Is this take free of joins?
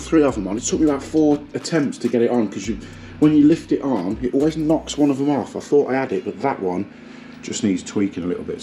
yes; 0 cuts

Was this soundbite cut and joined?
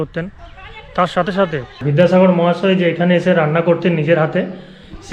yes; 1 cut; at 1.7 s

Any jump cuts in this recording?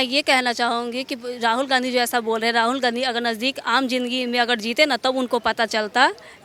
no; 0 cuts

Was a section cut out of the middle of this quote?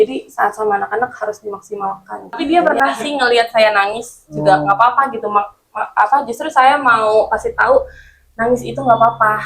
yes; 1 cut; at 2.4 s

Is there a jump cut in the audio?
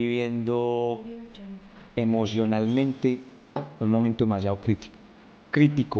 no; 0 cuts

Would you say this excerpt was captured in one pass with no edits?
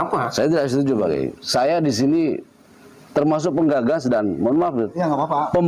yes; 0 cuts

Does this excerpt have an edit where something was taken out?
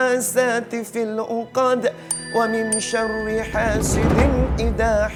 no; 0 cuts

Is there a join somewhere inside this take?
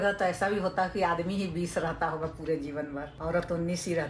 no; 0 cuts

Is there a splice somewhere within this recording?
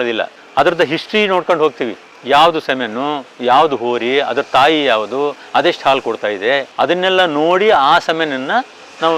no; 0 cuts

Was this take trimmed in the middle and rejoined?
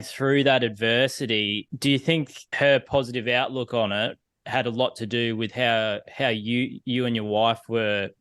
yes; 2 cuts; at 1.7 s, 2.5 s

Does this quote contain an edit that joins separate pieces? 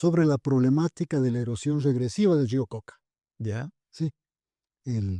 no; 0 cuts

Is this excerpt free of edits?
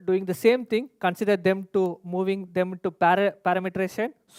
yes; 0 cuts

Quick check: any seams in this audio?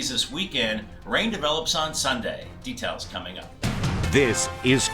yes; 1 cut; at 3.4 s

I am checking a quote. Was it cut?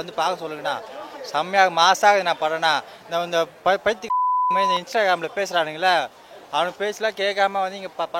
no; 0 cuts

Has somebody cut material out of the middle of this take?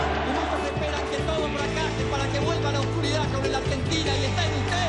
no; 0 cuts

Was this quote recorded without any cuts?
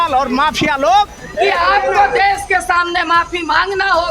no; 1 cut; at 1.3 s

